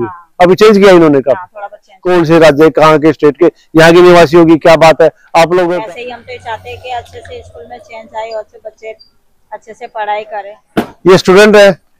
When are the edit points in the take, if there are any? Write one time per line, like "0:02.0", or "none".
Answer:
0:01.9
0:05.7
0:10.6